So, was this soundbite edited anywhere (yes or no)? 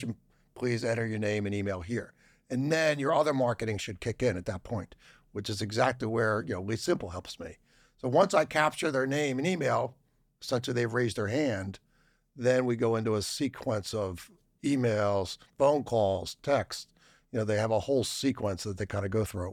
no